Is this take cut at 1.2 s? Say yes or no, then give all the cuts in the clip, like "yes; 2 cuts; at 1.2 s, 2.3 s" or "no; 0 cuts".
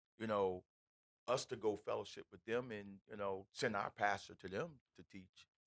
no; 0 cuts